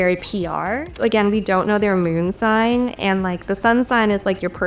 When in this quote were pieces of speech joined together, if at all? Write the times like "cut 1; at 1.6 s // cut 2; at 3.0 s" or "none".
cut 1; at 1.0 s

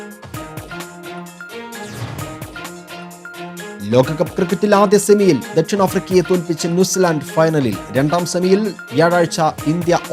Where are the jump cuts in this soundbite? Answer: cut 1; at 1.0 s

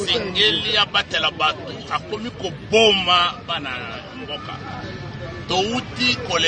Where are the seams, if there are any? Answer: none

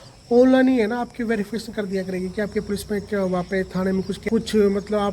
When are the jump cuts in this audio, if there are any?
cut 1; at 4.2 s

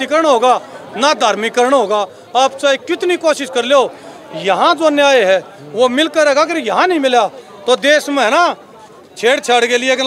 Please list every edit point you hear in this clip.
none

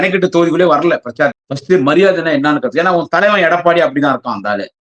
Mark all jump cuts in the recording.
cut 1; at 1.5 s

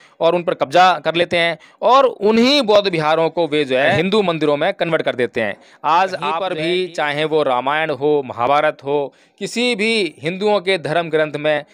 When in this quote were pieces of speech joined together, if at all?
cut 1; at 4.0 s // cut 2; at 6.5 s

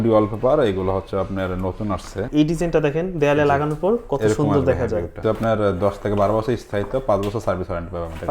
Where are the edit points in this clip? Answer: cut 1; at 2.3 s // cut 2; at 5.2 s

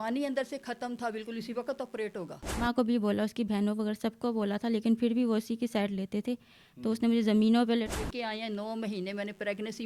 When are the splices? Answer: cut 1; at 2.6 s // cut 2; at 8.0 s

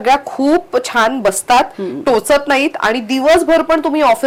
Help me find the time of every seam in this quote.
none

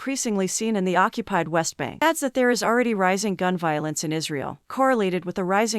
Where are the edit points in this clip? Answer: cut 1; at 2.0 s

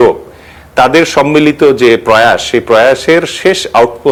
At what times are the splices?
none

